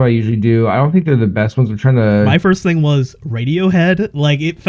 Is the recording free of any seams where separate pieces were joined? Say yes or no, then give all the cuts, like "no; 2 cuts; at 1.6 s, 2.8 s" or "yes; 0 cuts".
no; 1 cut; at 2.3 s